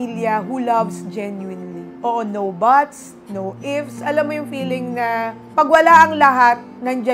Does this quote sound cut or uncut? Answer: uncut